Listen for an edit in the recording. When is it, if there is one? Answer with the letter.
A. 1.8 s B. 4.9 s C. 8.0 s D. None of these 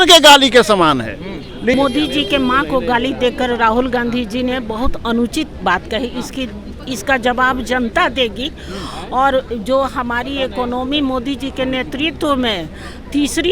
A